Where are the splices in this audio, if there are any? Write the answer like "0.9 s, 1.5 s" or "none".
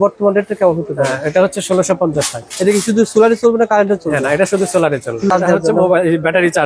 5.3 s